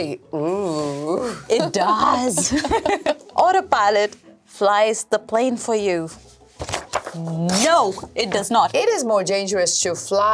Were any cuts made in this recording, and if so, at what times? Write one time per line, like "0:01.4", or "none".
0:03.0
0:08.7